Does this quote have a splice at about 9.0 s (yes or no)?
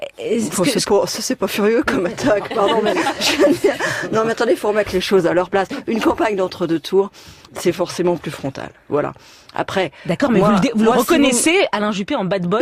no